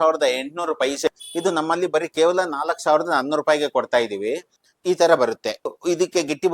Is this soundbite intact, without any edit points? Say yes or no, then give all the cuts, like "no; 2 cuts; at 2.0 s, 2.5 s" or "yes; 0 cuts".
no; 3 cuts; at 1.1 s, 4.5 s, 5.8 s